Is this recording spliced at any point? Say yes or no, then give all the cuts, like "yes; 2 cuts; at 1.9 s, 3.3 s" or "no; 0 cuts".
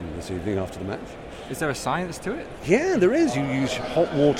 no; 0 cuts